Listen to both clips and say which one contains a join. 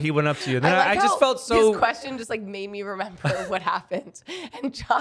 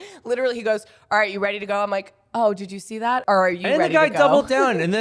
second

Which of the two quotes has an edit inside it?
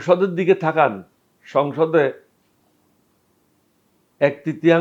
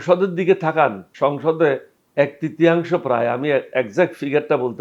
second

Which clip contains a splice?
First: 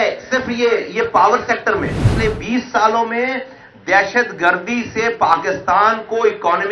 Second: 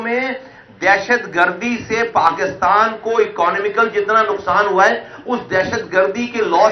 first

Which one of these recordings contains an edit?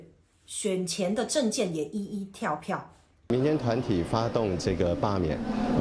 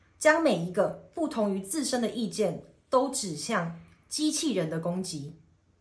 first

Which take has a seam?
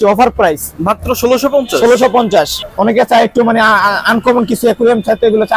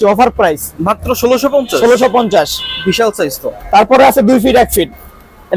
first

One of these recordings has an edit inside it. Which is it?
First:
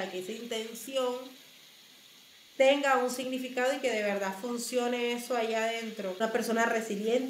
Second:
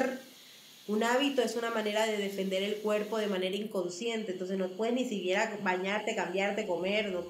first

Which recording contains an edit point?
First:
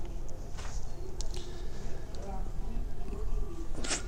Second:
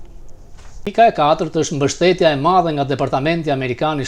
second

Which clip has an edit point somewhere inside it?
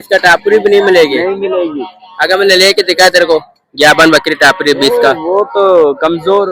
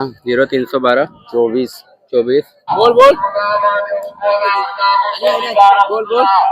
second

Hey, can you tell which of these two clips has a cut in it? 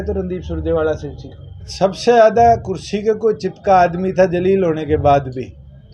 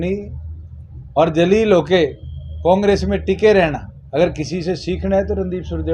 first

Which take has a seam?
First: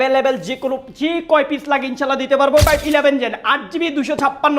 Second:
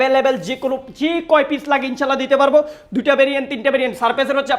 first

